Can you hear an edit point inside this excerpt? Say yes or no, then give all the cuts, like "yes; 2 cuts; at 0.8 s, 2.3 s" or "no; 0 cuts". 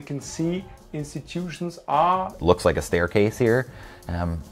yes; 1 cut; at 2.3 s